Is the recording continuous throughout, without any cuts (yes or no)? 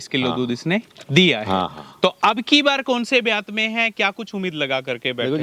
yes